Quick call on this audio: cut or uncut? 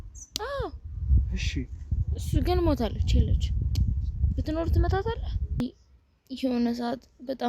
cut